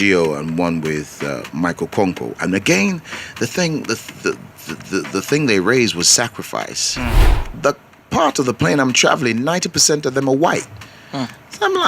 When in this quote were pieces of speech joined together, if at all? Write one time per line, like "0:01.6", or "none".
0:07.3